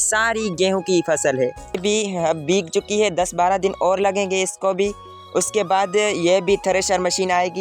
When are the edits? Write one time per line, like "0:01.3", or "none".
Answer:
0:01.8

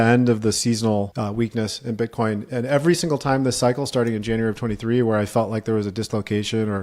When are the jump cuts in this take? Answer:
0:01.1

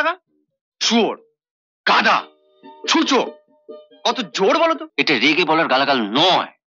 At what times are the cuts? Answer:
0:04.9

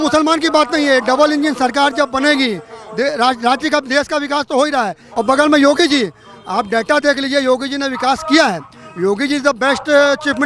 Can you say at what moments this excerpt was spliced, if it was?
0:05.0

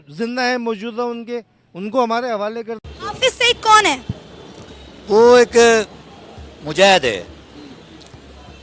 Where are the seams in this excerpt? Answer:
0:02.8

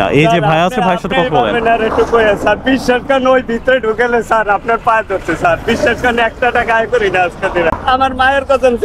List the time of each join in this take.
0:07.8

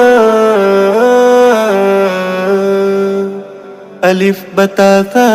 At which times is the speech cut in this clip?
0:03.4

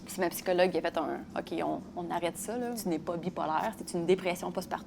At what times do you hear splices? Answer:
0:02.8

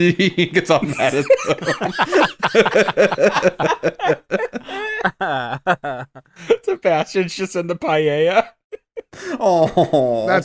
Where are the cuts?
none

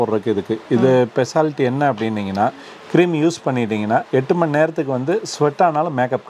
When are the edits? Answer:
none

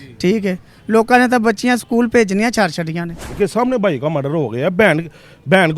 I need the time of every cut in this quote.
0:03.3

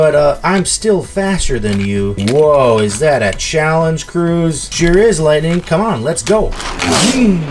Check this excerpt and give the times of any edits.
none

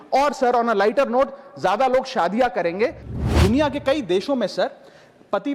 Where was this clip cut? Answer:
0:03.0

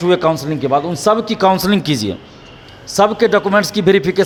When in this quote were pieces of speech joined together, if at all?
none

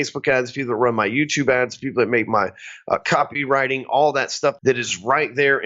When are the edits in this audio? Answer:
0:04.6

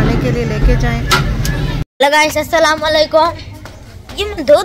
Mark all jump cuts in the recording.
0:01.8

